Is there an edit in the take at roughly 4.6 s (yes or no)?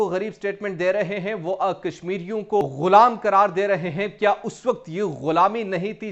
no